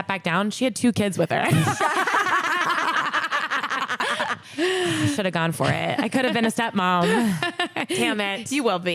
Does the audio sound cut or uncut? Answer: cut